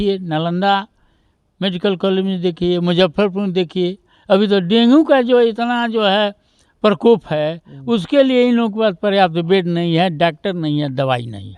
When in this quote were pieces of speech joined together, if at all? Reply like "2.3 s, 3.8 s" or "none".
none